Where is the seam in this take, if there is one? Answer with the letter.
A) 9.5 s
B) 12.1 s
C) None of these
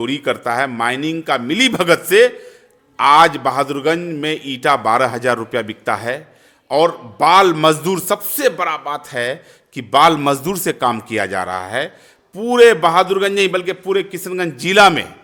C